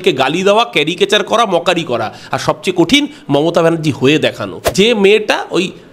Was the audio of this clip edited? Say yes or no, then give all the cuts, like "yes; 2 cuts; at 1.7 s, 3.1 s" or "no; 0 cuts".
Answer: yes; 1 cut; at 4.6 s